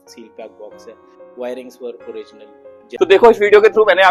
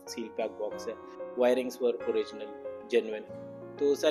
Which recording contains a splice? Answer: first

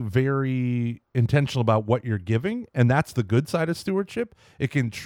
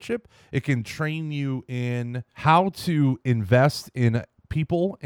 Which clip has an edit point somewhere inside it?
second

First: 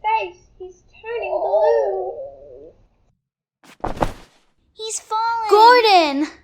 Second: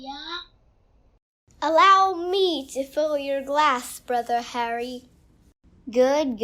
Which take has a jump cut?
first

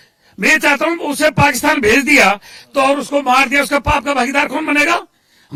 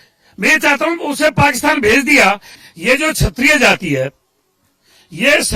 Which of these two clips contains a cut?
second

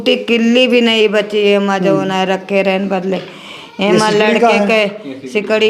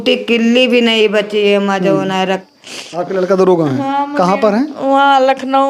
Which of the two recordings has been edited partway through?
second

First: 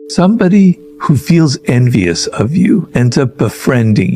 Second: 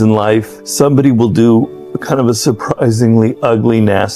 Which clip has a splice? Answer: first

